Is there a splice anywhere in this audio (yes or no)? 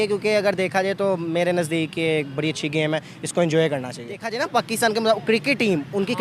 yes